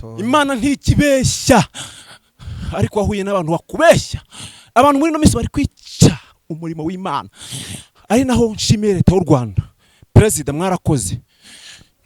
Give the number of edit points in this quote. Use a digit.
0